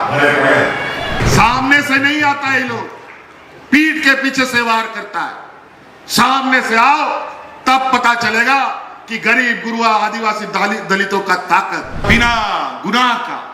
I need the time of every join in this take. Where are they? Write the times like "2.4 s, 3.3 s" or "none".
1.2 s, 12.0 s